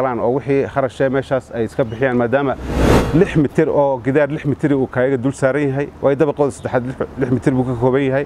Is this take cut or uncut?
uncut